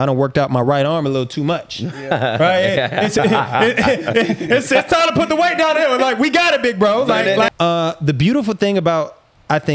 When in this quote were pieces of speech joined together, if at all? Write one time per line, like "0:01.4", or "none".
0:07.5